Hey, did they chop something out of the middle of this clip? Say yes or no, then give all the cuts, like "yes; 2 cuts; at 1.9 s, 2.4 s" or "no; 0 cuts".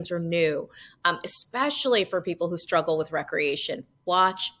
no; 0 cuts